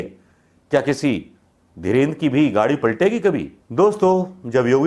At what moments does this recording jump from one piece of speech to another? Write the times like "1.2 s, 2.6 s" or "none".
3.6 s